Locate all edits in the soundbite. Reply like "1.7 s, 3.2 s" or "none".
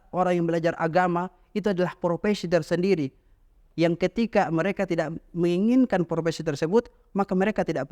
none

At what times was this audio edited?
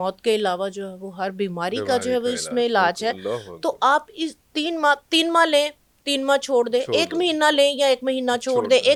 none

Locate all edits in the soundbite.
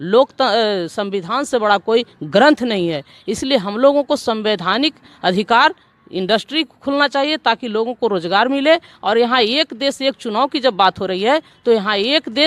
none

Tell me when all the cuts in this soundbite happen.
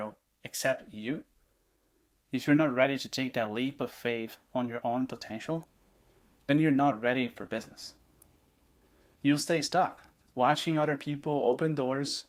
none

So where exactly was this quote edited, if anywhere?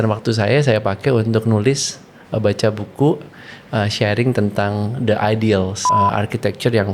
5.8 s

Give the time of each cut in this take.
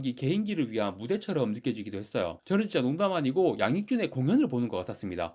none

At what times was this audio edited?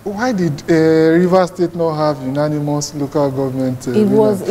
none

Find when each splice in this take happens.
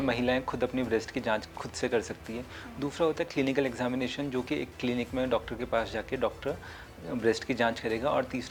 none

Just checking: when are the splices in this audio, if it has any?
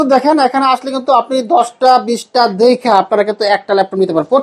none

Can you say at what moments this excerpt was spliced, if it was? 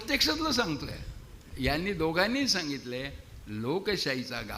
1.4 s

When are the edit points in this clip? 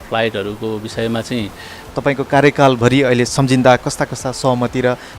1.8 s

